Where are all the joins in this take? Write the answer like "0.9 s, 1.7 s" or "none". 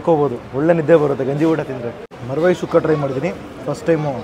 2.1 s